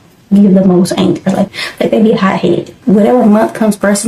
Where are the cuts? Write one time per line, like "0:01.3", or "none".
0:01.5
0:02.7